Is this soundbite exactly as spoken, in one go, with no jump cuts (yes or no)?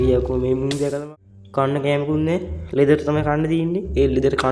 no